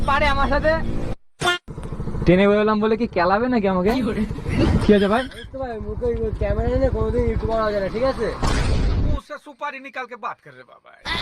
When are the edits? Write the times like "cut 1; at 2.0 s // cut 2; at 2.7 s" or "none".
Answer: cut 1; at 1.4 s